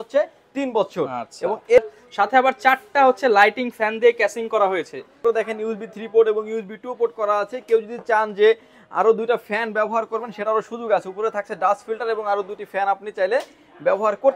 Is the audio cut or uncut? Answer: cut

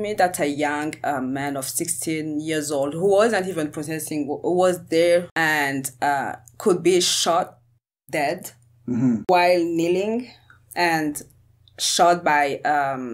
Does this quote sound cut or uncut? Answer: cut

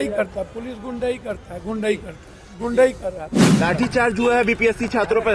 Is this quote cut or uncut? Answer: cut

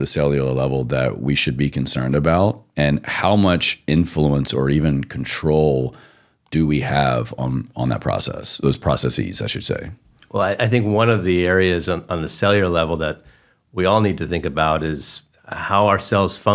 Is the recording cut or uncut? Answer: uncut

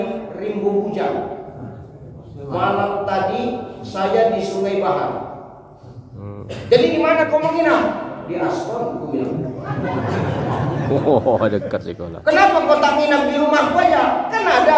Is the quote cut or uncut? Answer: uncut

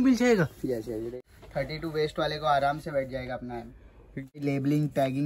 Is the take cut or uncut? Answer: cut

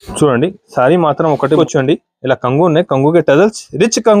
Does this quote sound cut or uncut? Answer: cut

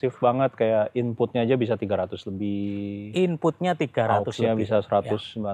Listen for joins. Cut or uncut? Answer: uncut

